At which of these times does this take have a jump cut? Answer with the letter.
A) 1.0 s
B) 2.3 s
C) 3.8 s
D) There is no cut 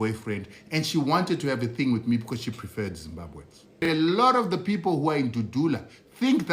C